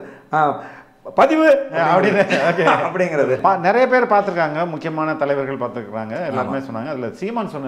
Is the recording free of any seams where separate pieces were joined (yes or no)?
no